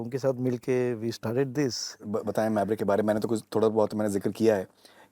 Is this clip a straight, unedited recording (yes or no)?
no